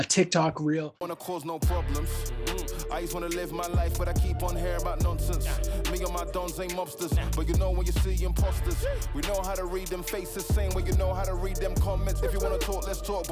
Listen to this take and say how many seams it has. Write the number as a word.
one